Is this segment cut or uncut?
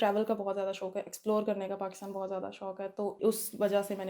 cut